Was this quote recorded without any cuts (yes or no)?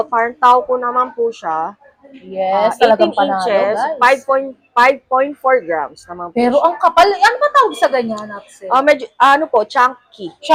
yes